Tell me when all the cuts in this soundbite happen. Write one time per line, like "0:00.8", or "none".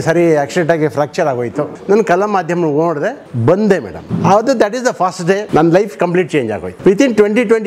0:01.8
0:03.3
0:04.0
0:05.4
0:06.7